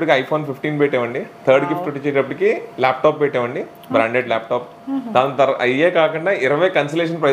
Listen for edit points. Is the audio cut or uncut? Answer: uncut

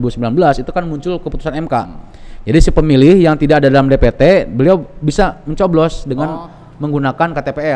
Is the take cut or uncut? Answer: uncut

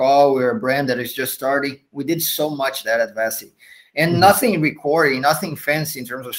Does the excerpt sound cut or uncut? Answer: uncut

